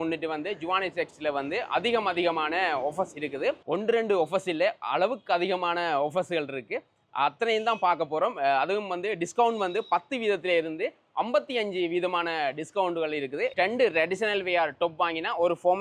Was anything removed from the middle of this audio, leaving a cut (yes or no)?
no